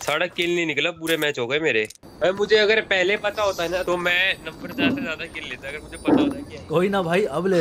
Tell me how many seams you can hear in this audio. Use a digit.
3